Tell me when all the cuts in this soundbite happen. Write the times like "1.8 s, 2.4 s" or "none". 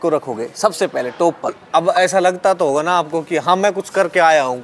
1.6 s